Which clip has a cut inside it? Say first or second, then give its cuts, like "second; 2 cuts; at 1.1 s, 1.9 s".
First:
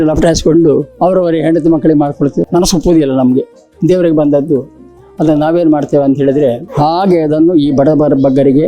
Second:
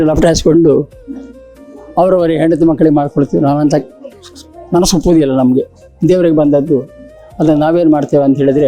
first; 3 cuts; at 0.9 s, 2.4 s, 6.7 s